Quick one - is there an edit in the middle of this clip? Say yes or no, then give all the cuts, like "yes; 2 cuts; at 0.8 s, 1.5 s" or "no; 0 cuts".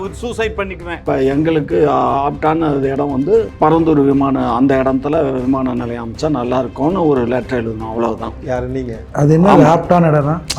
yes; 2 cuts; at 1.0 s, 3.5 s